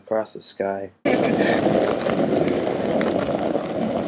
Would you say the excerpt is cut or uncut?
cut